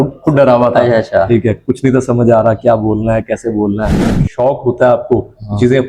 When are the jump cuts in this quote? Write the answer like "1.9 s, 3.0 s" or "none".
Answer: 4.2 s